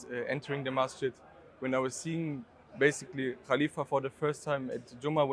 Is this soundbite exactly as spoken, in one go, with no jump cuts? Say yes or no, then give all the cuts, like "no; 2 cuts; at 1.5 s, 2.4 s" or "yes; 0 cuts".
yes; 0 cuts